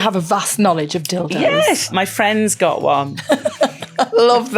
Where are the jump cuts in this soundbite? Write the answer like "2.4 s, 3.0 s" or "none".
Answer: 1.9 s

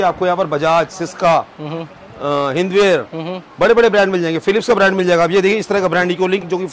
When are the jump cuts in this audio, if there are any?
none

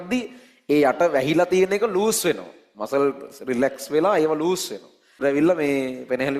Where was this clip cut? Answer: 5.2 s

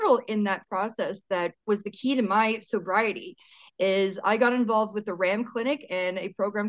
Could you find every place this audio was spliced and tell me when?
1.6 s

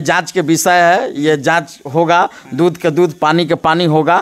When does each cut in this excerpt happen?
none

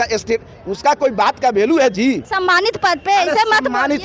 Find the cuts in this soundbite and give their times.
none

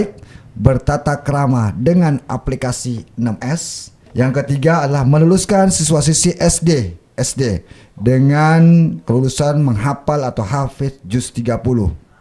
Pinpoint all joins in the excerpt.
3.9 s

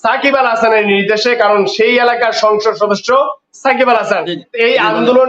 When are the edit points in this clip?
4.0 s

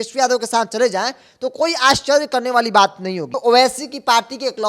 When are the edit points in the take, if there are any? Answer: 3.3 s

